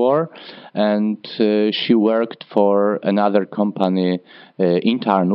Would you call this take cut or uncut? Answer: uncut